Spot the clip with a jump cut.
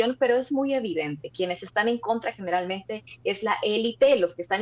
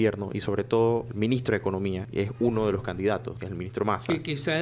second; 3 cuts; at 1.1 s, 2.0 s, 3.4 s

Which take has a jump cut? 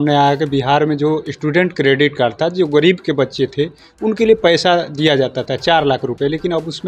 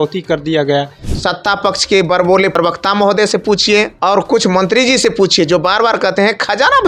second; 3 cuts; at 1.0 s, 2.5 s, 3.9 s

